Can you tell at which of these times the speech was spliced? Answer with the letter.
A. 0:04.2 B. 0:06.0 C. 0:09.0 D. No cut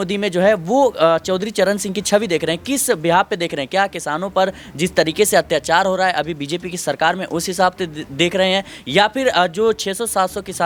D